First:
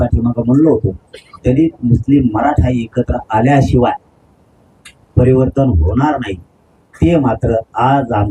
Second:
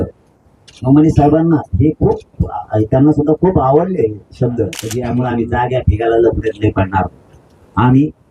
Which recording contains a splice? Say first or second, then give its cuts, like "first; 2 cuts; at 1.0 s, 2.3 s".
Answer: second; 1 cut; at 4.9 s